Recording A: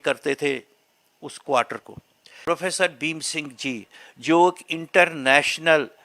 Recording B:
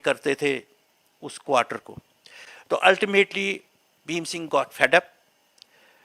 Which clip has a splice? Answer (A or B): A